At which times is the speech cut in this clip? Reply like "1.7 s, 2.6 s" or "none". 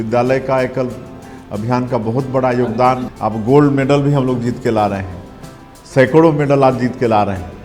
3.1 s